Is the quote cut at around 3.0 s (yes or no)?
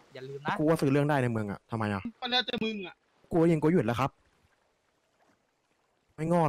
no